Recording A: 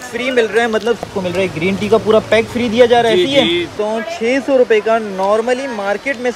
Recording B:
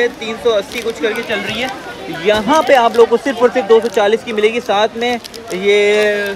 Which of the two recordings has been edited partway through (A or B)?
A